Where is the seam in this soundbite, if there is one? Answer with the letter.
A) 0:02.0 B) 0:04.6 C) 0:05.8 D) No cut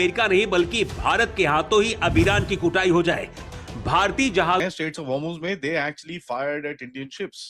B